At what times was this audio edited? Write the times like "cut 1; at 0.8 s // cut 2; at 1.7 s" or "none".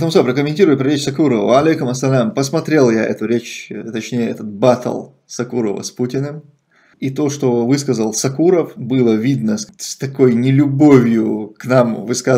cut 1; at 7.0 s